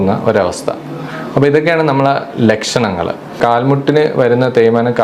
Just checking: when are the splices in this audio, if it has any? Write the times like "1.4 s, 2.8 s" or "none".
3.4 s